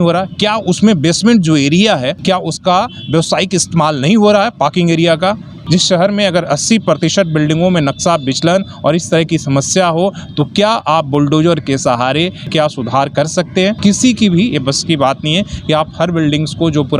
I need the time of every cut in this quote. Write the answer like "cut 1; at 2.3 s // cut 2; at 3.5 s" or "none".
cut 1; at 2.2 s // cut 2; at 5.5 s // cut 3; at 12.4 s // cut 4; at 13.8 s